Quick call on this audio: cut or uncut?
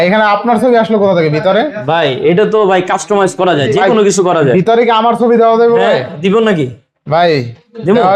uncut